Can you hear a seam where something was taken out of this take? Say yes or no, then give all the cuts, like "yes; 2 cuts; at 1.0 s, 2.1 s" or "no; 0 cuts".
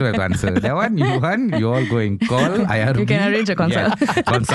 no; 0 cuts